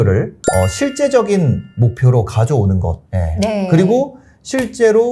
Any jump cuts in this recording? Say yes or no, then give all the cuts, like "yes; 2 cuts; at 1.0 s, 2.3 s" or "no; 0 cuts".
no; 0 cuts